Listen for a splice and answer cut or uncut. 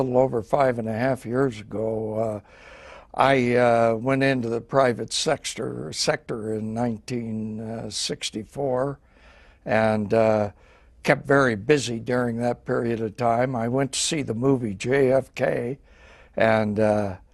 cut